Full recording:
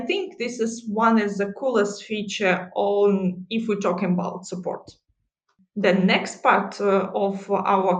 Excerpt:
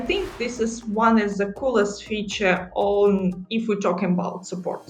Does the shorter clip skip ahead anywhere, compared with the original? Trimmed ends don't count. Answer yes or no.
no